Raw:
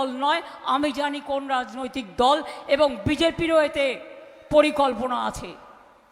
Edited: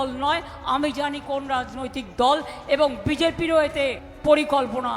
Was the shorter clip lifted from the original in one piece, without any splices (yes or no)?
no